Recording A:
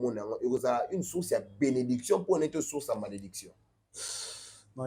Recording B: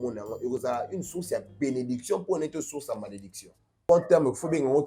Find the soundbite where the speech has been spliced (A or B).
B